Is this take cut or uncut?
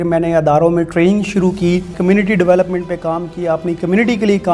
cut